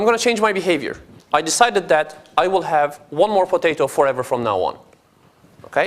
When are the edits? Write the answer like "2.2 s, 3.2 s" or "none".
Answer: 2.2 s